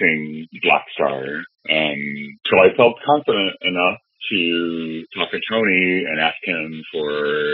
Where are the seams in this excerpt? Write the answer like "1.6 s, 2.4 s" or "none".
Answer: 2.5 s